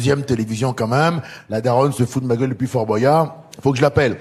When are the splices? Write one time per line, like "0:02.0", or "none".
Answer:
none